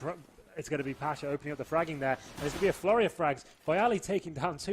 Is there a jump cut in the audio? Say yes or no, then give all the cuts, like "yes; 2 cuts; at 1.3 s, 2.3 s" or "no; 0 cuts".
yes; 1 cut; at 3.1 s